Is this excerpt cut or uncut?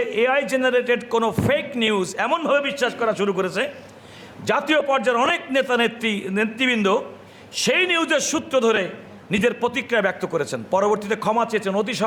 uncut